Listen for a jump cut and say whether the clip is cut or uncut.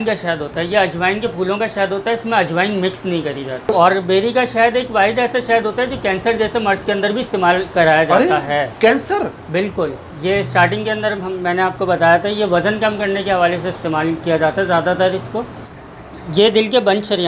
cut